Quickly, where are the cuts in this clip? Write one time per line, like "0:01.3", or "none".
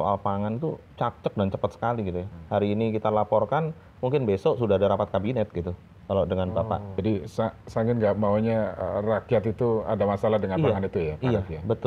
0:06.9